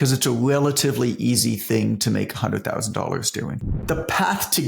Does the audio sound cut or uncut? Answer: cut